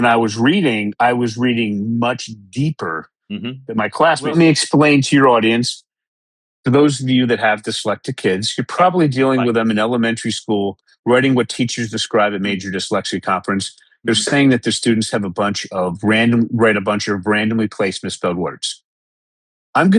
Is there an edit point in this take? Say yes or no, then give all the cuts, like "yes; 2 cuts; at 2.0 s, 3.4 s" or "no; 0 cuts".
yes; 1 cut; at 4.3 s